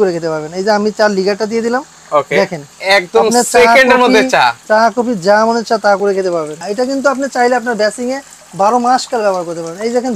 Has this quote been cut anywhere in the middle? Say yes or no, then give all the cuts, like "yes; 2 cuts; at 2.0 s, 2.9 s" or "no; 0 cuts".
yes; 2 cuts; at 2.7 s, 6.6 s